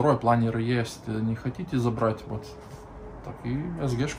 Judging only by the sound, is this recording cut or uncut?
uncut